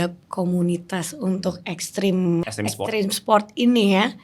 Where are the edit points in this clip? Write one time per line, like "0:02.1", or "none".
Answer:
0:02.4